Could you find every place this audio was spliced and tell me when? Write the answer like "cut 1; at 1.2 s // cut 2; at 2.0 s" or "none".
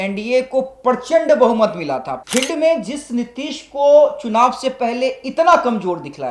cut 1; at 2.1 s